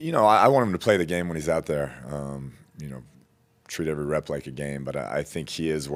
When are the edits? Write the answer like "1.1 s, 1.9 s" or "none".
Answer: none